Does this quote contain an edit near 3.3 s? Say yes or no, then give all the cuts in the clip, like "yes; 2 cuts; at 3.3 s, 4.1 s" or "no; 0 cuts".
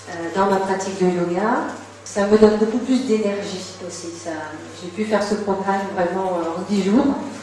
yes; 1 cut; at 3.3 s